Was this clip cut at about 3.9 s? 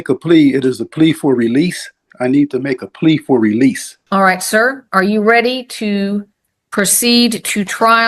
yes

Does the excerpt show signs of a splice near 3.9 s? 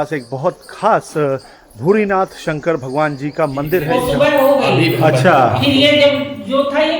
yes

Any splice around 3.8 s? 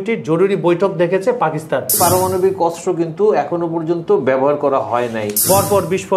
no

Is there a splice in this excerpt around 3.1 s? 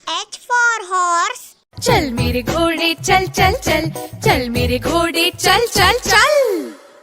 no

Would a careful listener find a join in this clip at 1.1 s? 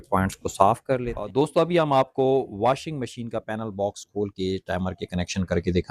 yes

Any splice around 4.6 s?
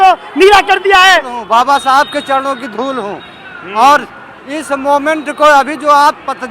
no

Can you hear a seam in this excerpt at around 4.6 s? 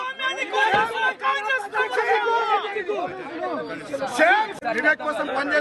yes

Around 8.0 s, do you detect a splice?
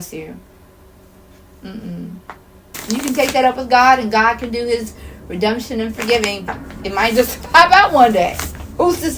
no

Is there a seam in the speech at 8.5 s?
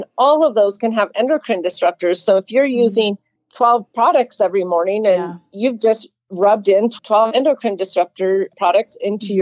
yes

